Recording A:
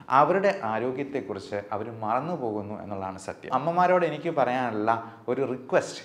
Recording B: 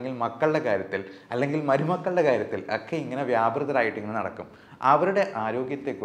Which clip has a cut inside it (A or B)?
A